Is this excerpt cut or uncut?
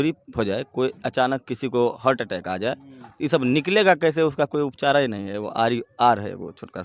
uncut